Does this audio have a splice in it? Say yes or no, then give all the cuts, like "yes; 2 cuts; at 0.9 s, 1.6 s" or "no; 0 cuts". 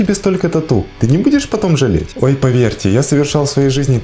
no; 0 cuts